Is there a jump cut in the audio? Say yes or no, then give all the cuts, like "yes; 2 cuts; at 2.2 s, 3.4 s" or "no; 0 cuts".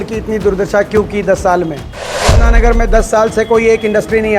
yes; 1 cut; at 2.4 s